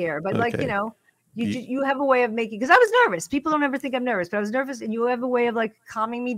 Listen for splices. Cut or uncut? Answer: uncut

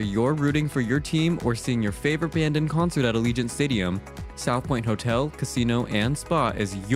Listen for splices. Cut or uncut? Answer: uncut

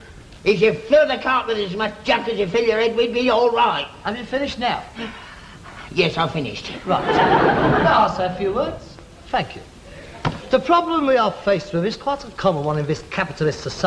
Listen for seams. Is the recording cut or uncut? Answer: cut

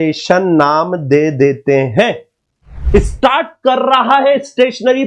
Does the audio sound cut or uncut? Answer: cut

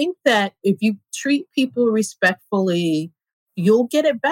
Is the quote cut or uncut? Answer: uncut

